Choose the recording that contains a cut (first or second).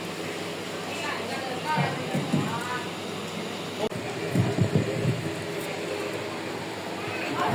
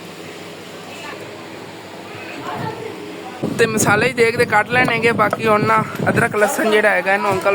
second